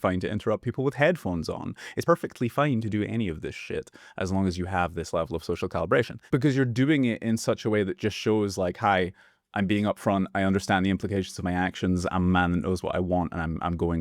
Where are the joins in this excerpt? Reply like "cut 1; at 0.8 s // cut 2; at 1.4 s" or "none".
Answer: cut 1; at 2.0 s // cut 2; at 6.2 s